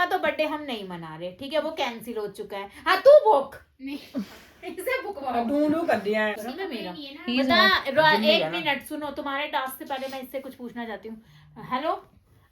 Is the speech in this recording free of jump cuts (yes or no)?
no